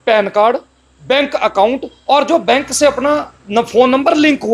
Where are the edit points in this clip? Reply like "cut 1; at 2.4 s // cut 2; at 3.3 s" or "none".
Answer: none